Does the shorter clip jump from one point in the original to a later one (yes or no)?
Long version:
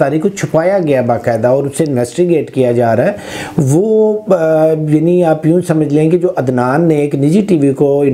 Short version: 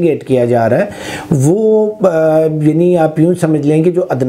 no